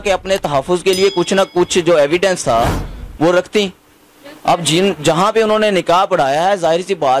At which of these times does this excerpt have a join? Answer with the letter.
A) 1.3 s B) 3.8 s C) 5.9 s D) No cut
D